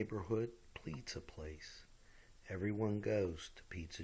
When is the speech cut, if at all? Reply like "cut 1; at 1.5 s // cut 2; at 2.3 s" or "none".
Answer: none